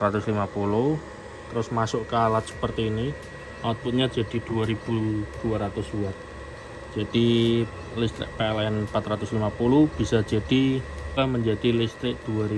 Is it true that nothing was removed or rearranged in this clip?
no; 1 cut; at 11.2 s

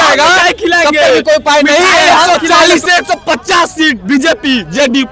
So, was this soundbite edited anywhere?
yes; 1 cut; at 2.3 s

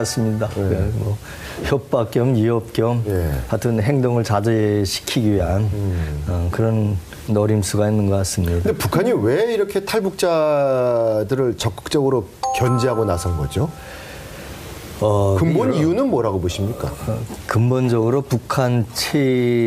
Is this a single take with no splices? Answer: no; 1 cut; at 9.7 s

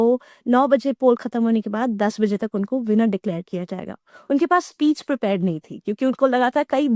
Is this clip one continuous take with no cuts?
yes; 0 cuts

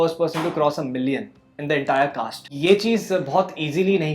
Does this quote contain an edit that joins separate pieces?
yes; 1 cut; at 2.4 s

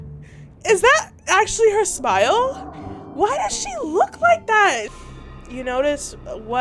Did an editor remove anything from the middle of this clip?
yes; 1 cut; at 4.9 s

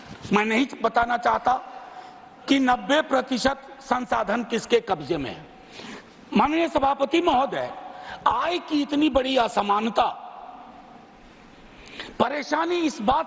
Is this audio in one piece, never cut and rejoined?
yes; 0 cuts

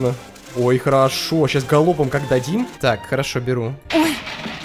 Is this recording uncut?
no; 1 cut; at 2.7 s

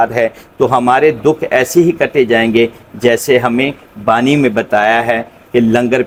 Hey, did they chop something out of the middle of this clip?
no; 0 cuts

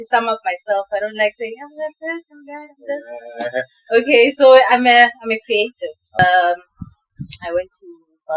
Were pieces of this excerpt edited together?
yes; 1 cut; at 6.2 s

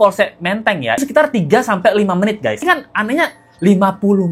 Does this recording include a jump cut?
yes; 2 cuts; at 1.0 s, 2.6 s

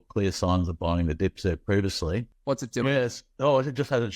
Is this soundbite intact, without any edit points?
no; 1 cut; at 2.3 s

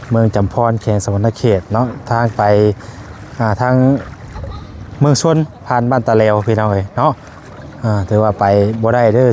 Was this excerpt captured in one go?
yes; 0 cuts

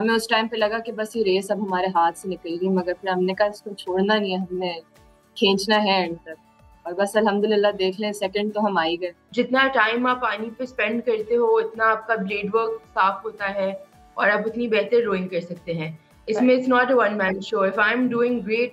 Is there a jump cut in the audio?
yes; 1 cut; at 9.2 s

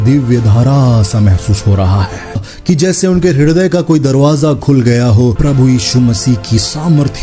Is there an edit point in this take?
yes; 2 cuts; at 2.5 s, 5.4 s

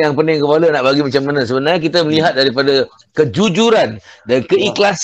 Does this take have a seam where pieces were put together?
no; 0 cuts

